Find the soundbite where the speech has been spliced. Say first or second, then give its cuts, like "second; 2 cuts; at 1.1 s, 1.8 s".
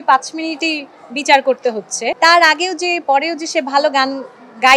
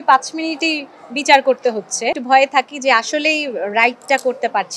second; 1 cut; at 2.2 s